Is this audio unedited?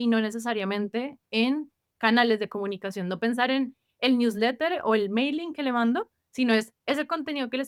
yes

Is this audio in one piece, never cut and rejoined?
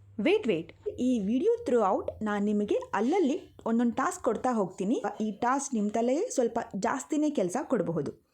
no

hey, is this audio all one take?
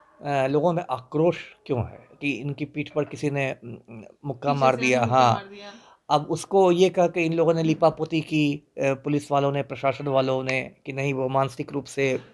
no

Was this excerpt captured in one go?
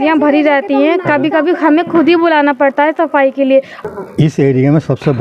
no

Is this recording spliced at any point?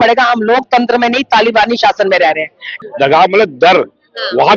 yes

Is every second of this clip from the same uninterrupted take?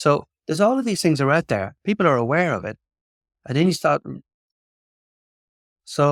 yes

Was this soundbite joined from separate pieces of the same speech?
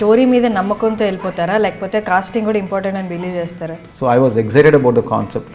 yes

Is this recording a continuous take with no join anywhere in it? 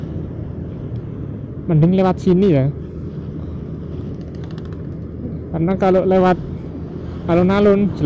yes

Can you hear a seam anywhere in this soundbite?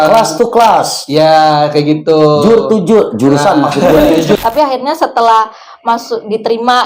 yes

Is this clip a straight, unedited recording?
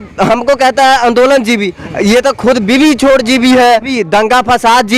no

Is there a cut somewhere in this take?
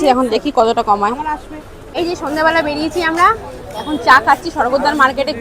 yes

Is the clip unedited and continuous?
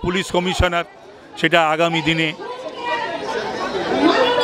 yes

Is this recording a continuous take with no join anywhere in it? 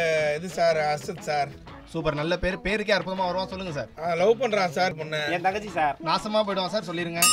yes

